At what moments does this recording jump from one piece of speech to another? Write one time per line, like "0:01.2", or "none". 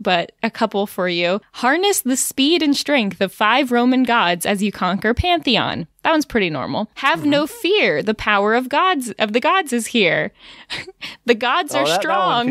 none